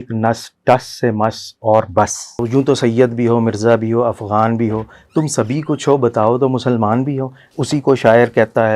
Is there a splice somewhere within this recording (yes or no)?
yes